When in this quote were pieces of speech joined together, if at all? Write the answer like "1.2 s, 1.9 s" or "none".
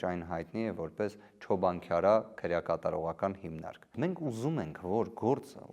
3.9 s